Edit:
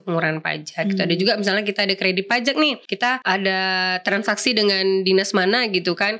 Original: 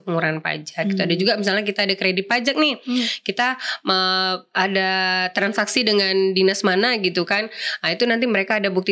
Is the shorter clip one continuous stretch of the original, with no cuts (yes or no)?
no